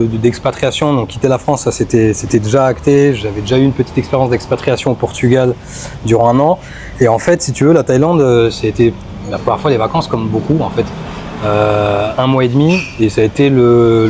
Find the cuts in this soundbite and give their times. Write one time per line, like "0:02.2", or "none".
none